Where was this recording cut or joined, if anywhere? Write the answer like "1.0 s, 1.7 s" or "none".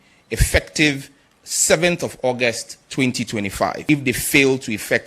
3.8 s